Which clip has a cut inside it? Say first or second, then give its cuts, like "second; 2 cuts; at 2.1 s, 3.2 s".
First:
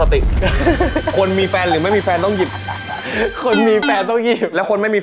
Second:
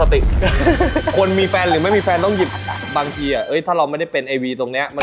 second; 1 cut; at 2.9 s